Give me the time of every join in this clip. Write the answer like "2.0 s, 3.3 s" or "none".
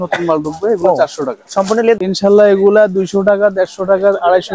2.0 s